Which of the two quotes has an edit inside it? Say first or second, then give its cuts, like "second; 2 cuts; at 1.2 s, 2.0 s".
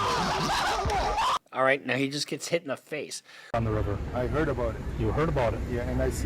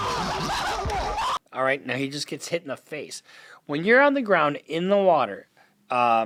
first; 1 cut; at 3.5 s